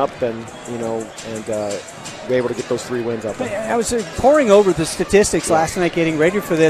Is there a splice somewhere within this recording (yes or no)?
yes